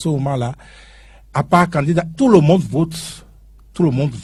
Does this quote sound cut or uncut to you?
uncut